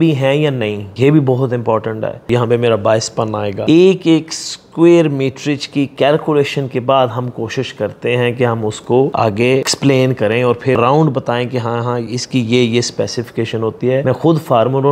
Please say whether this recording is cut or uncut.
cut